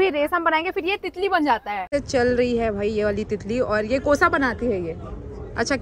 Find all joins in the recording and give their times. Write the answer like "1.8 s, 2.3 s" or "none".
1.9 s